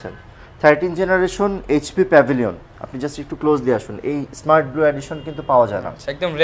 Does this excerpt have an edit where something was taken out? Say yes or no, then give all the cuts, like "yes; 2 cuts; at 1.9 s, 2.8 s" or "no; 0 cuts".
no; 0 cuts